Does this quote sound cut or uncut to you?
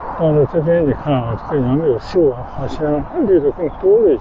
uncut